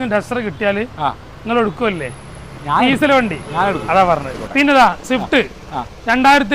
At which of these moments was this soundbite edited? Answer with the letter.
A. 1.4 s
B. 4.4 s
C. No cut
B